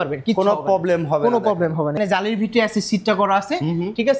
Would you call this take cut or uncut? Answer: cut